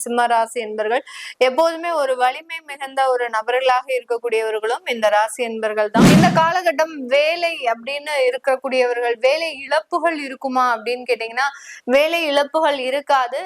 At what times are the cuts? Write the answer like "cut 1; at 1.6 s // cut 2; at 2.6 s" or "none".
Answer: cut 1; at 6.1 s